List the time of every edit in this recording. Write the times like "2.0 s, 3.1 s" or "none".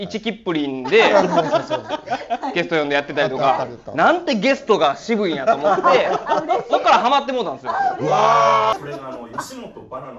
8.7 s